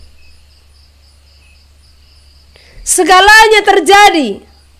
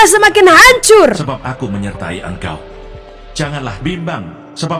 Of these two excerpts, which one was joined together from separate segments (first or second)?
second